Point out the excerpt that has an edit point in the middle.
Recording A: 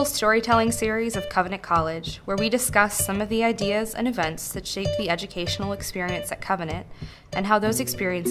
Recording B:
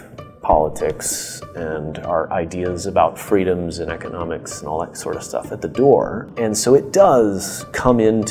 B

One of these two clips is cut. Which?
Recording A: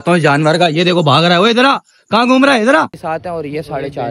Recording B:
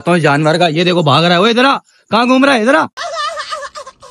A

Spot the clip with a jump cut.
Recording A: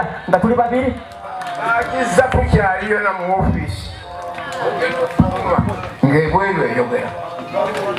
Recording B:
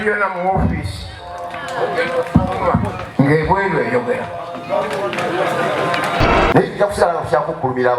B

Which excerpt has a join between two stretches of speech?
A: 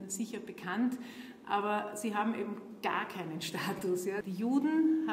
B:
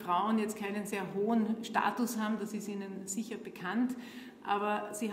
A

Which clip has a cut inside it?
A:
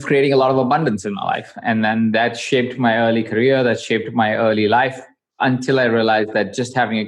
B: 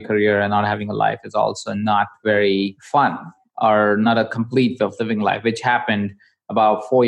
B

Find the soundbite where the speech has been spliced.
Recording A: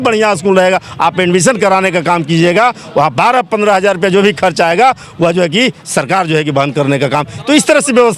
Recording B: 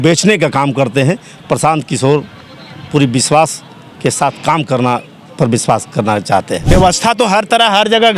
B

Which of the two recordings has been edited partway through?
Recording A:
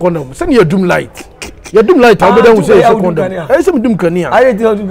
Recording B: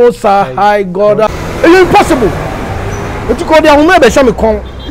B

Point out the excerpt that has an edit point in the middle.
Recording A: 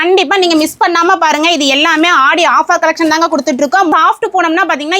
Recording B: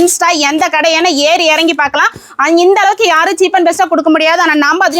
A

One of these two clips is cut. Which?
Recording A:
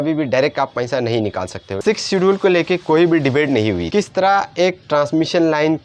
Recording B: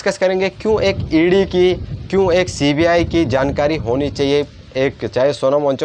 A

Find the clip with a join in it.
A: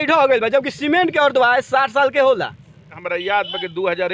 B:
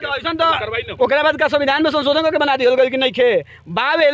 A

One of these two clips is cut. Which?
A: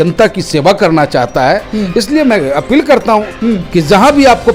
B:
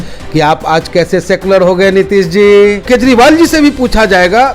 B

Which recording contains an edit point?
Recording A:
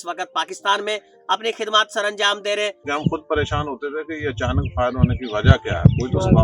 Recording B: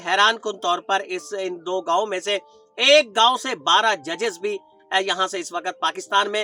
A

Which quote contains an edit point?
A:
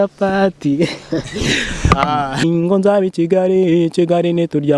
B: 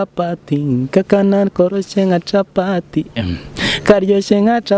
A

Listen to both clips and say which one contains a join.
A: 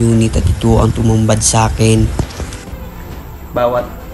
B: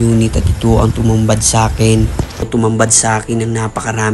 B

